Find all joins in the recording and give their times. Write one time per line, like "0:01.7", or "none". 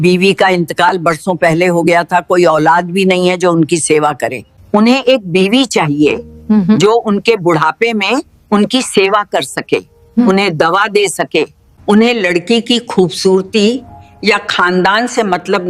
none